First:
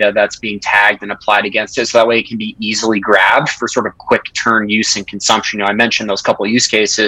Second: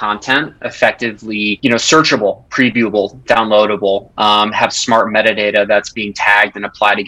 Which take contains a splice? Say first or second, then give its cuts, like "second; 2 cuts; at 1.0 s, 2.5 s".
second; 1 cut; at 1.6 s